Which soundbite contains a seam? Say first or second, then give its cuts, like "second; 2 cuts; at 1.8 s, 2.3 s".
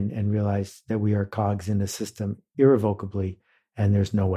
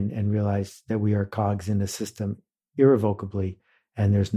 first; 1 cut; at 2.4 s